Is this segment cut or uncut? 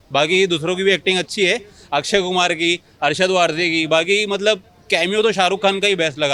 uncut